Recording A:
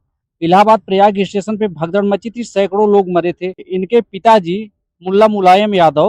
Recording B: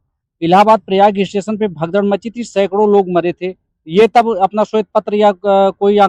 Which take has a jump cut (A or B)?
A